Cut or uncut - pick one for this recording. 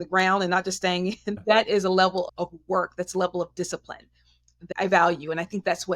cut